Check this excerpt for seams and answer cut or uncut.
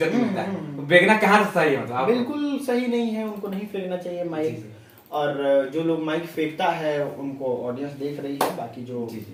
uncut